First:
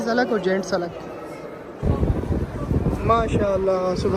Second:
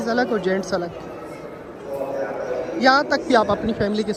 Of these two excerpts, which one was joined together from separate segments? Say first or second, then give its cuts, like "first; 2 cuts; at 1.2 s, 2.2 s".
first; 1 cut; at 1.8 s